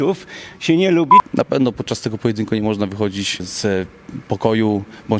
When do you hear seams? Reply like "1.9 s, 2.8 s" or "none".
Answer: 1.2 s, 3.5 s